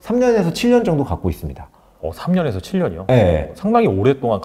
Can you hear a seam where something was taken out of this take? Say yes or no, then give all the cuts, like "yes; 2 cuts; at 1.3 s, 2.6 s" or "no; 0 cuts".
no; 0 cuts